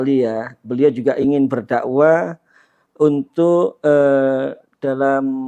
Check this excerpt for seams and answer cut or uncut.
uncut